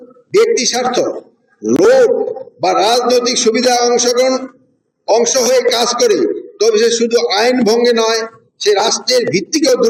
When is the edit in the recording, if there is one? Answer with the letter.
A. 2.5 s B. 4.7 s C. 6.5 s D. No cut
D